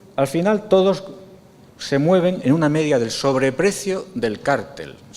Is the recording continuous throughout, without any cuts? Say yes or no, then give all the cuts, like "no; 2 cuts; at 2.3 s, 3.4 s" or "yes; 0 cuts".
no; 1 cut; at 2.7 s